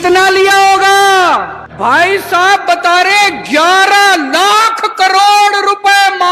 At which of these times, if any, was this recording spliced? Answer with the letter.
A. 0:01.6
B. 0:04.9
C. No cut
A